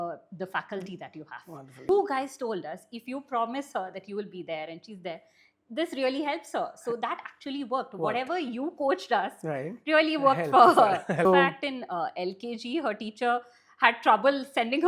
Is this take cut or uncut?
cut